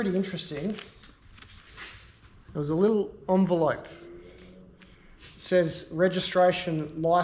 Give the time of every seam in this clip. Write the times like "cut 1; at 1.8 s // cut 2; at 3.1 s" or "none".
cut 1; at 1.7 s